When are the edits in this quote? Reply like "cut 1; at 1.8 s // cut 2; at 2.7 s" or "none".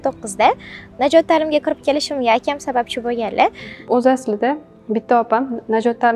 none